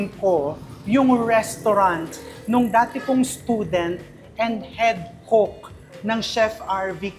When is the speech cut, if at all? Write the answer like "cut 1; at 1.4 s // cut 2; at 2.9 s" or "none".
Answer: none